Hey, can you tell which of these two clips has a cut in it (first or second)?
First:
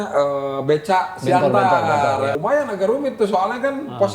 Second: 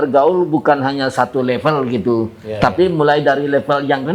first